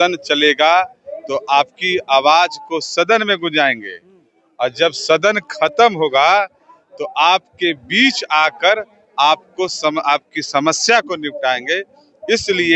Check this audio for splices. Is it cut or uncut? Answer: uncut